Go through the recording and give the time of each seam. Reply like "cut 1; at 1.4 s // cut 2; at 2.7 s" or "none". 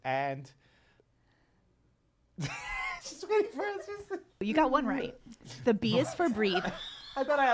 cut 1; at 1.0 s // cut 2; at 4.4 s

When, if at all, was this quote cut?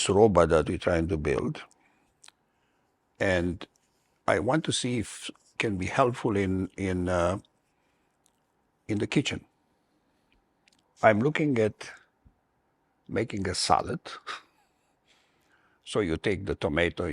cut 1; at 10.8 s

